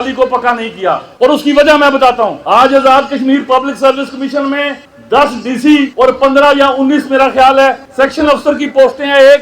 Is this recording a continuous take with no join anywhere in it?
yes; 0 cuts

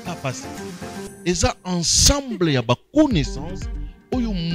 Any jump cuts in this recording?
no; 0 cuts

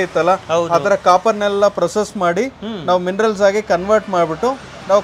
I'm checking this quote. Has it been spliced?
no; 0 cuts

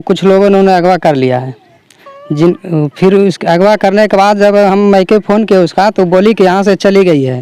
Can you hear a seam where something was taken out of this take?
no; 0 cuts

